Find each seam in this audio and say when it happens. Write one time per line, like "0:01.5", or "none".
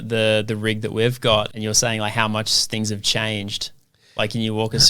0:01.5